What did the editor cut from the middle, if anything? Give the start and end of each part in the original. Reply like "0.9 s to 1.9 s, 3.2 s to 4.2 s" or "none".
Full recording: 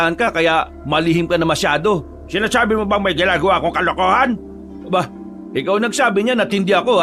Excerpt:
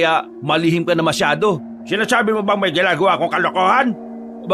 none